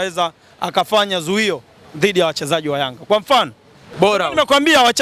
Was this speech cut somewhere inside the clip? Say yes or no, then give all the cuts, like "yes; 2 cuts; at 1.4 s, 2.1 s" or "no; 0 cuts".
yes; 1 cut; at 3.8 s